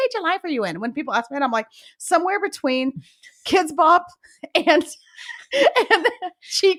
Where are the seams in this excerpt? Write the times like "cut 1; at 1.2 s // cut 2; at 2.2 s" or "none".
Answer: none